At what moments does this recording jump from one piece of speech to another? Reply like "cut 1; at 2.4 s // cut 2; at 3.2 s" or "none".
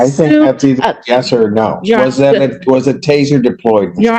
none